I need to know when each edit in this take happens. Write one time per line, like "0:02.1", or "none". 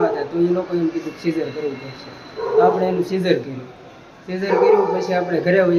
none